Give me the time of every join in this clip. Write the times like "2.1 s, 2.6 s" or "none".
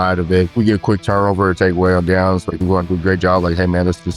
1.0 s, 2.5 s